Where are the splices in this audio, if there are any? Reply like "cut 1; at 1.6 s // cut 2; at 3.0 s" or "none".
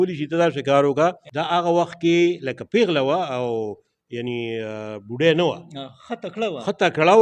cut 1; at 1.3 s